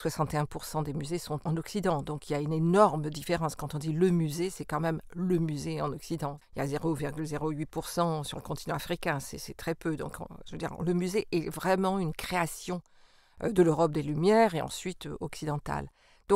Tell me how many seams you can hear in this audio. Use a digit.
2